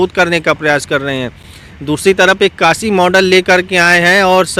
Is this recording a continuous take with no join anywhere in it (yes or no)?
yes